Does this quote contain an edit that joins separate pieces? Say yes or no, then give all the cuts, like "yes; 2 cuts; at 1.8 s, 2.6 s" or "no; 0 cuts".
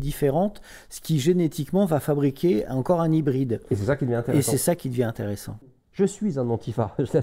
yes; 1 cut; at 5.5 s